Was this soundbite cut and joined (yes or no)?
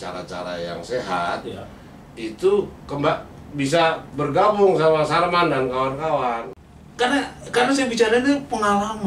yes